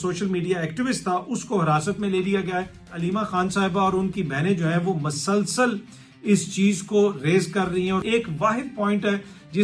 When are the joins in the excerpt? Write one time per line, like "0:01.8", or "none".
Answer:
0:02.9
0:08.0